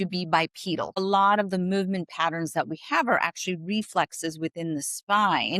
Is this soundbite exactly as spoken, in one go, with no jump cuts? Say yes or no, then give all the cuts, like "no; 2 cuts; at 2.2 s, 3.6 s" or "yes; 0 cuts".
no; 1 cut; at 1.0 s